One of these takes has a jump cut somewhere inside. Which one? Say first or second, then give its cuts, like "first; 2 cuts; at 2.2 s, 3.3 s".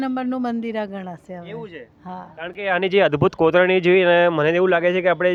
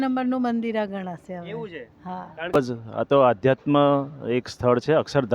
second; 1 cut; at 2.5 s